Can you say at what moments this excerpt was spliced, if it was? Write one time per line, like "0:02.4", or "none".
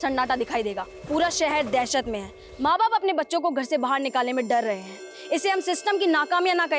0:00.9